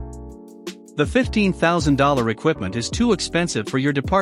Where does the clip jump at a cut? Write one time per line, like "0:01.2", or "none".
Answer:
0:00.9